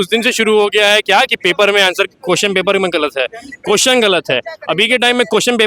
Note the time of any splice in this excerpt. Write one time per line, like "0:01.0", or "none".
none

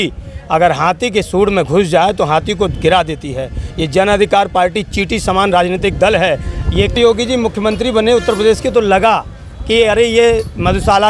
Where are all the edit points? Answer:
0:06.9

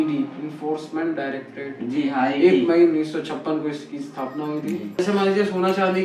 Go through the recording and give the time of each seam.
0:05.0

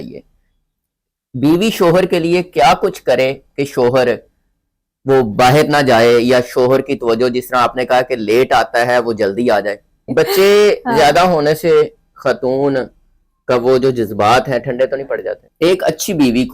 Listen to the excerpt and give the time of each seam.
0:10.1
0:15.4

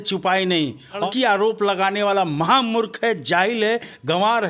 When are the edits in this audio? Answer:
0:01.0

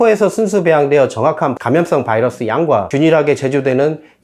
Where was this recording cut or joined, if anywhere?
0:01.6
0:02.9

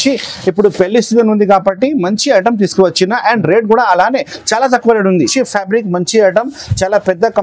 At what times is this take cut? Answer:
0:05.3

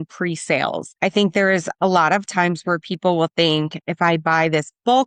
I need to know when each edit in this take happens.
none

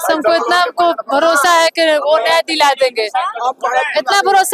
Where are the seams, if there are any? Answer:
none

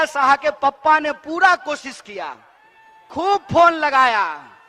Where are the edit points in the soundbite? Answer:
none

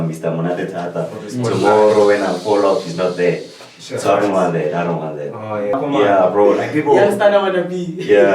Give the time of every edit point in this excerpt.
0:05.8

